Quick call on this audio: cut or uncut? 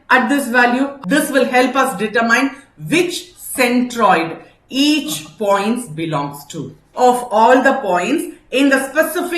cut